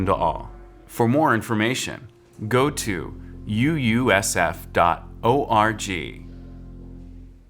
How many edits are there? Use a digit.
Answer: 1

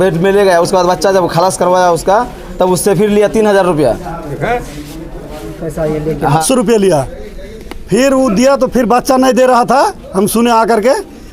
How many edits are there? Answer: 1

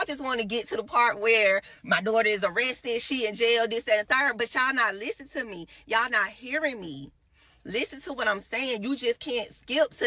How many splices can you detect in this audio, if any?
0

